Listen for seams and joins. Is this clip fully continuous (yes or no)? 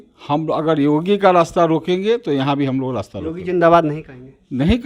yes